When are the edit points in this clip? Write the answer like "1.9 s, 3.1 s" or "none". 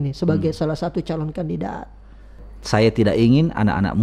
2.3 s